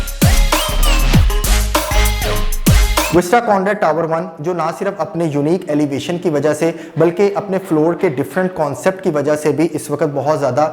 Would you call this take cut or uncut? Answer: cut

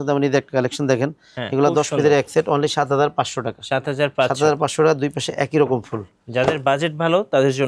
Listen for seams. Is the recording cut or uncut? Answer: uncut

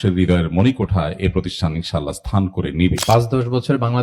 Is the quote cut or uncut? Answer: cut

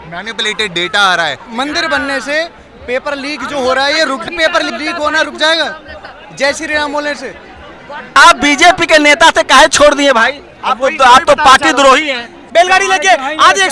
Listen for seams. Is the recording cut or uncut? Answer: cut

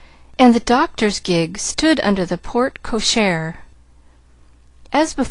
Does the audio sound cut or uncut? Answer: cut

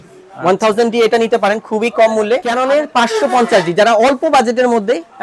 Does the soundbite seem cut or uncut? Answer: cut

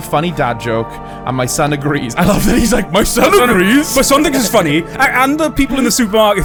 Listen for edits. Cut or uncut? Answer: uncut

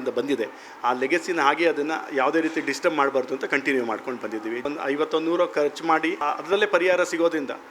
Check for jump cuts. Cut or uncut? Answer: cut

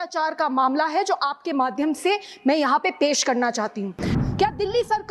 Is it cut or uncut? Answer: cut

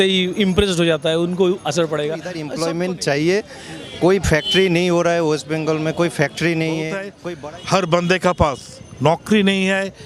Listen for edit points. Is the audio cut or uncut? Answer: cut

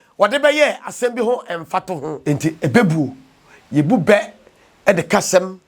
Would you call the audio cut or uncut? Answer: cut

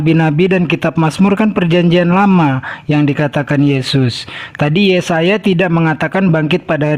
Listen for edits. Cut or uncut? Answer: uncut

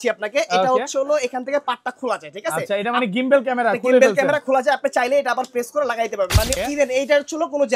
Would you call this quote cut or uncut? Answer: cut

